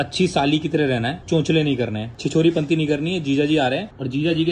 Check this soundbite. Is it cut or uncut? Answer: cut